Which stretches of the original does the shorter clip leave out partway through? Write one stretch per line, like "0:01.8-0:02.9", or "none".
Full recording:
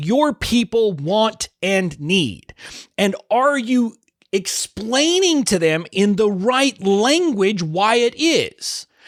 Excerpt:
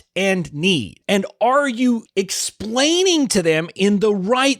0:02.4-0:02.8
0:04.0-0:04.2